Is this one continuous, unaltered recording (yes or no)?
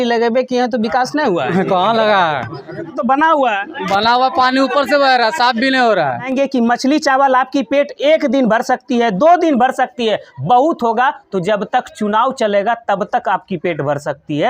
no